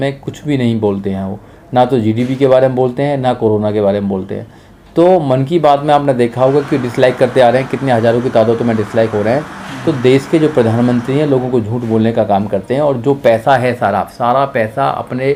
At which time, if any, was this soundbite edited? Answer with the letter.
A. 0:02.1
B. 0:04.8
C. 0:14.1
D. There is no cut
D